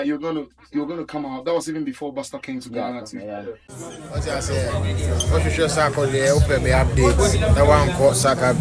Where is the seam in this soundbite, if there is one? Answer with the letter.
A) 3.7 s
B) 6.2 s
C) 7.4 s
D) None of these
A